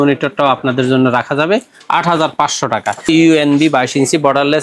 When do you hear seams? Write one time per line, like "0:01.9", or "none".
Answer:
0:03.1

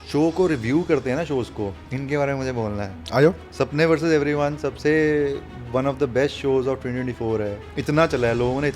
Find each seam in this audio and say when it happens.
0:01.8
0:03.4
0:07.7

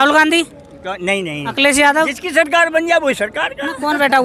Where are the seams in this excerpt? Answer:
none

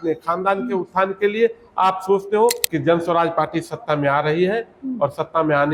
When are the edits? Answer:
0:02.7

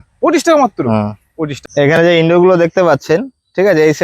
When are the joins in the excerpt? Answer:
0:01.6

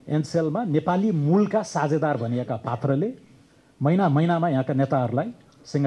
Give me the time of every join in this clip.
none

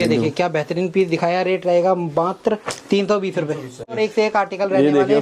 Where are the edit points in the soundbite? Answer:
0:04.0

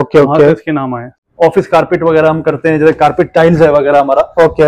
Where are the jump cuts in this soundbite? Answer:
0:01.2

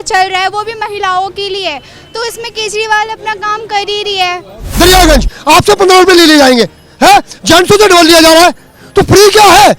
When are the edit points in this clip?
0:04.6

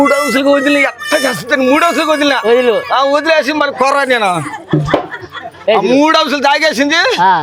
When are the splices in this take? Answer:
none

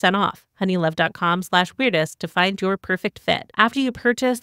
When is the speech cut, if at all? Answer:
none

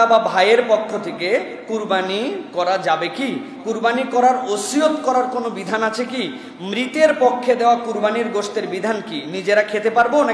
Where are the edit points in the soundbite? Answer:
none

